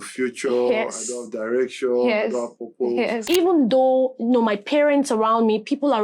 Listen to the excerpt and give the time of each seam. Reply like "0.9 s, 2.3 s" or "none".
3.2 s